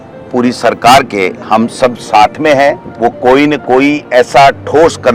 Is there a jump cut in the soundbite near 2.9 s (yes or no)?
yes